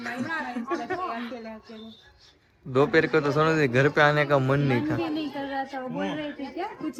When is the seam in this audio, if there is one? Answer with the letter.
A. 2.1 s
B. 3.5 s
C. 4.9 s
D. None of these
D